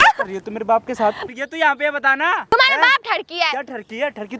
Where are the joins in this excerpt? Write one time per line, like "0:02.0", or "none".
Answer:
0:01.2
0:02.5